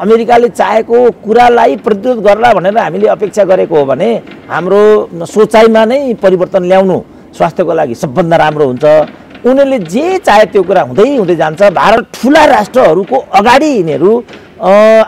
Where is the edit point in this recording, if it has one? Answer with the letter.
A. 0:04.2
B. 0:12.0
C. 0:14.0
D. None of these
B